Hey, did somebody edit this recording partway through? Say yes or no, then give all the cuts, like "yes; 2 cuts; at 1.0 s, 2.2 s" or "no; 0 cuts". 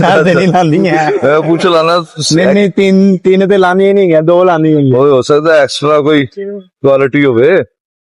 no; 0 cuts